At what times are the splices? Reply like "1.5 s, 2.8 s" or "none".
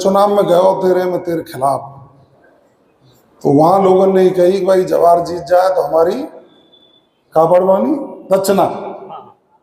none